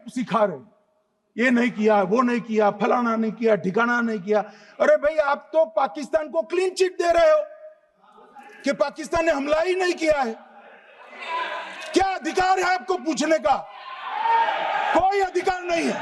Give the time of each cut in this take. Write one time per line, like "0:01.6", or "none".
none

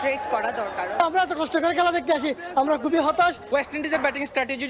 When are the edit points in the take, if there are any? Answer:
0:01.0
0:03.4

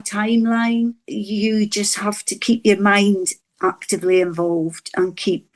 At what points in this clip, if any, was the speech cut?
0:01.0

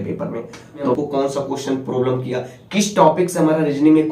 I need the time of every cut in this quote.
0:01.0

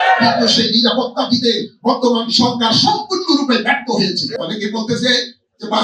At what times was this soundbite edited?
0:04.4

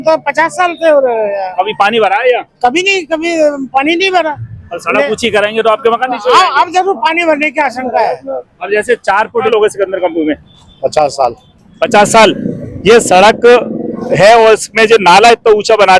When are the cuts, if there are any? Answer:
0:09.5

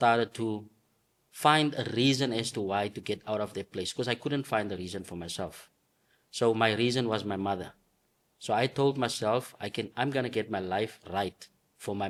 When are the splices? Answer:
none

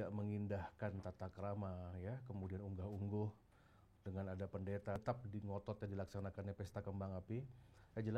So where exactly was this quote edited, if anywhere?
0:05.0

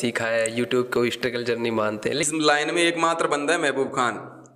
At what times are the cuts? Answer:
0:02.3

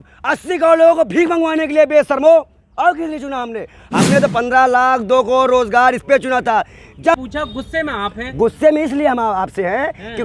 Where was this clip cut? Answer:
0:07.1

